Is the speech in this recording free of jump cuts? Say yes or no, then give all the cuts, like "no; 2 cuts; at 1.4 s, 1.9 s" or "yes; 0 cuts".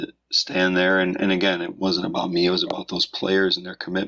yes; 0 cuts